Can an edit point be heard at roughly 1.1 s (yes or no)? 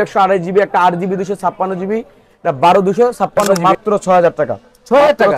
no